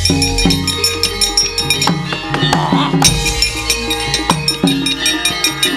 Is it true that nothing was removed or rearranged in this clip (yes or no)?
yes